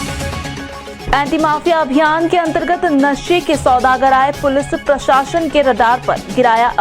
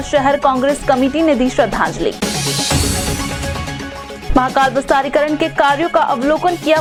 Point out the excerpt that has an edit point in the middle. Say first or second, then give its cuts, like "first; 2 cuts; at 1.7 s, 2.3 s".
first; 1 cut; at 1.0 s